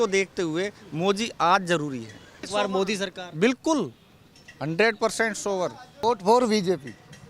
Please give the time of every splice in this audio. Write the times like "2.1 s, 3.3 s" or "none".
2.5 s, 6.0 s